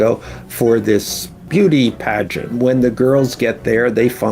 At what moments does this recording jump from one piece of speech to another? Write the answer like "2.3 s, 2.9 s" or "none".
1.4 s, 2.6 s